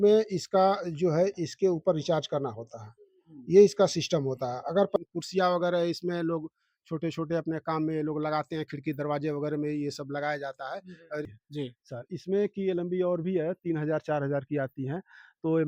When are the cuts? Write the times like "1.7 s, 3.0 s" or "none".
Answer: 5.0 s, 11.3 s

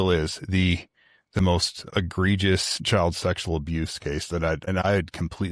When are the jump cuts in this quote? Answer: 1.8 s, 2.7 s, 4.8 s

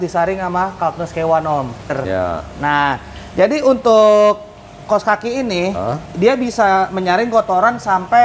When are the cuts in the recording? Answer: 1.9 s

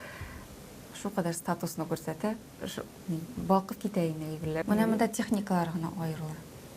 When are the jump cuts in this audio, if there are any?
4.6 s

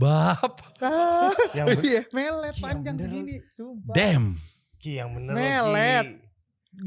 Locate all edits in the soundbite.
none

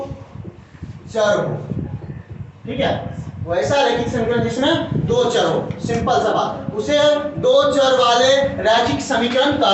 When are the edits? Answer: none

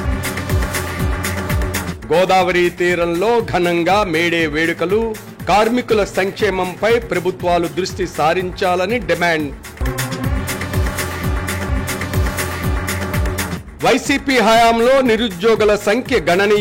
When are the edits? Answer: 1.7 s

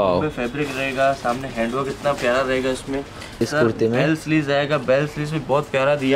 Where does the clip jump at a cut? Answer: 3.4 s

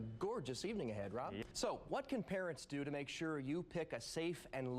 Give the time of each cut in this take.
1.5 s

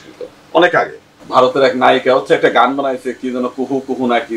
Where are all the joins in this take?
1.1 s

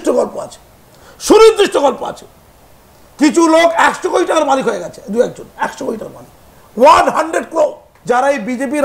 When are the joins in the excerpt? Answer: 7.9 s

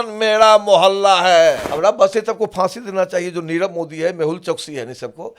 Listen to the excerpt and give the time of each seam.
1.7 s

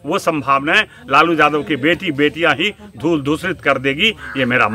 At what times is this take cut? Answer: none

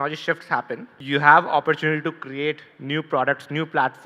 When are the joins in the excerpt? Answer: 0.9 s

